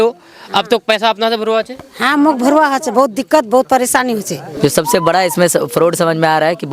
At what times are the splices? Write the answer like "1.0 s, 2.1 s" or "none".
4.4 s